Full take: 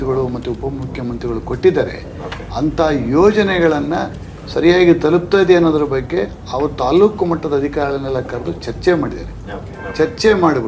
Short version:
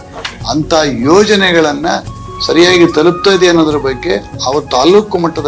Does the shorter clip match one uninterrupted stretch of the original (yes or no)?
yes